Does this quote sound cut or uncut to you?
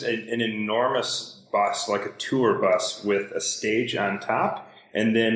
uncut